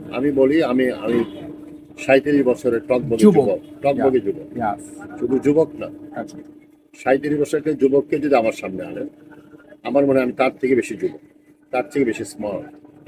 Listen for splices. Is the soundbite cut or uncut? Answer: uncut